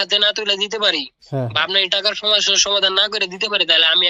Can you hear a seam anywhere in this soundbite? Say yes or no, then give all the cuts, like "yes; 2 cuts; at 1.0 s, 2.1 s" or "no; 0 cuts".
no; 0 cuts